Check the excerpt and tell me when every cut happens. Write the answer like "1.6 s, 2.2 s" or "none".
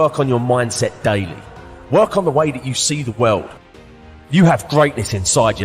3.6 s